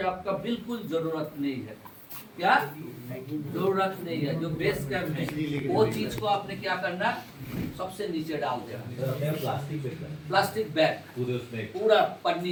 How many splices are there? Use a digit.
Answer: 0